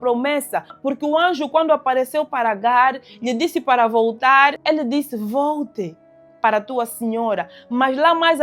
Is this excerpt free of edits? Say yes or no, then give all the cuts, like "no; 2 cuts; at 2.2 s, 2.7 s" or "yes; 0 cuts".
no; 1 cut; at 4.6 s